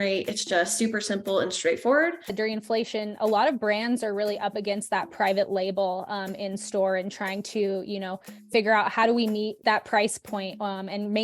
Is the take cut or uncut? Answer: cut